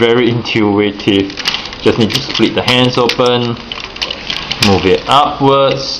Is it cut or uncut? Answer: uncut